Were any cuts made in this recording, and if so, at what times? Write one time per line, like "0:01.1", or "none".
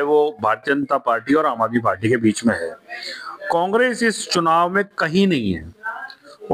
none